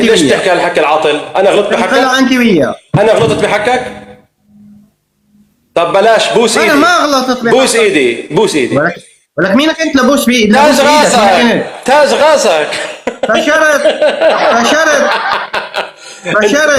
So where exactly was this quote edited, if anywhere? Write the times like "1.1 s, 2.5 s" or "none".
none